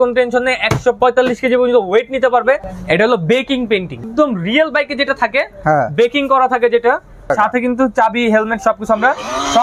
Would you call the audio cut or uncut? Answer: cut